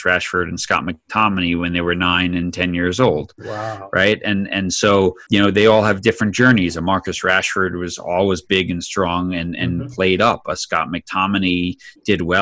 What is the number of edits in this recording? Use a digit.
1